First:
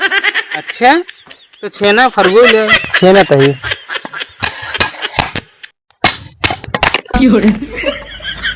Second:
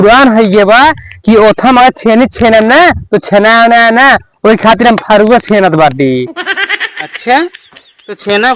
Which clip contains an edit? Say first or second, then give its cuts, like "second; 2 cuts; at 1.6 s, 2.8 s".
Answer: first; 1 cut; at 7.0 s